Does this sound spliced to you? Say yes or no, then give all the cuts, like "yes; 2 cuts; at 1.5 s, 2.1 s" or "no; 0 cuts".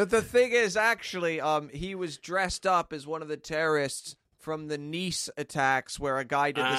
yes; 1 cut; at 3.4 s